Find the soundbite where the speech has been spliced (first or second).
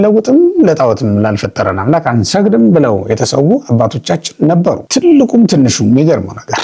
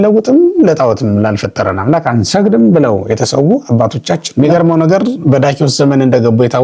second